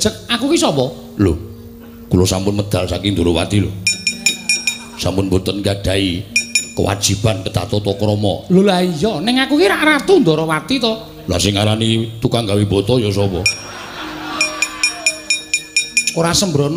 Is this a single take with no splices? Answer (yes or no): yes